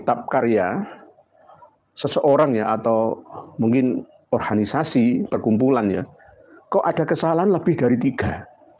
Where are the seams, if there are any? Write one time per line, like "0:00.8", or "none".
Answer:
none